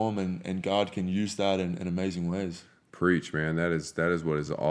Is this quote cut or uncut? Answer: uncut